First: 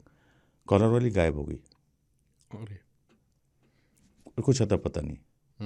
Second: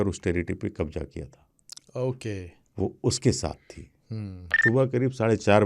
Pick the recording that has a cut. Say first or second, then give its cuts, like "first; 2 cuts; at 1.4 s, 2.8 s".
second; 1 cut; at 4.6 s